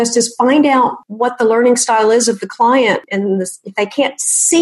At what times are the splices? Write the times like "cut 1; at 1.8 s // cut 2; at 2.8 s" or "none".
cut 1; at 1.1 s // cut 2; at 3.0 s